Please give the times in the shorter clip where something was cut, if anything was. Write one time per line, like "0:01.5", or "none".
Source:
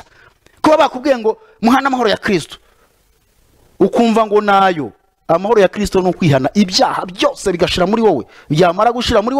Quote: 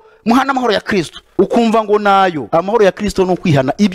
0:01.2
0:02.4